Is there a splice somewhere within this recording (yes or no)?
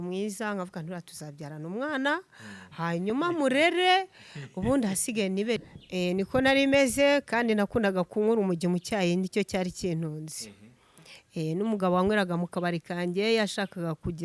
yes